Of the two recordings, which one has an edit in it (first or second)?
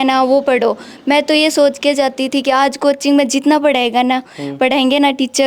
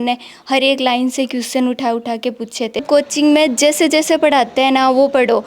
second